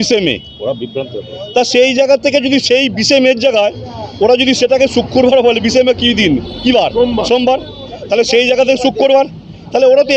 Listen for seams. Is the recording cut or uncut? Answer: uncut